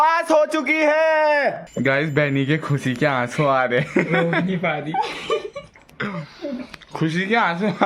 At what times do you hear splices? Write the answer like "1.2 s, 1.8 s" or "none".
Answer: 1.7 s